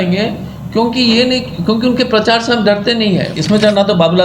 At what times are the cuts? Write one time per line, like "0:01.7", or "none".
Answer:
0:03.3